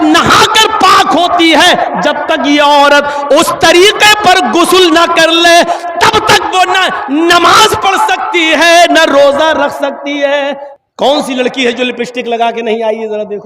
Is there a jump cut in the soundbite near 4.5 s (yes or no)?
no